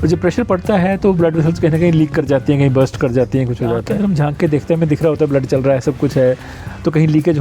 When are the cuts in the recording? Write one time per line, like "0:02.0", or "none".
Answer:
0:03.9

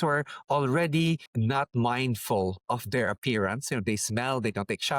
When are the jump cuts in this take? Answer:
0:01.3

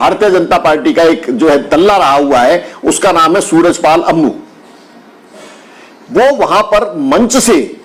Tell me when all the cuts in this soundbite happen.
none

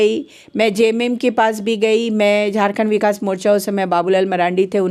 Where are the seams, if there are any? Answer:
none

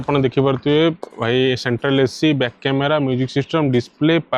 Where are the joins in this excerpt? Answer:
none

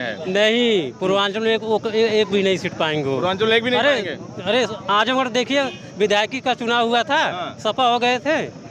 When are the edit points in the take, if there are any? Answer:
none

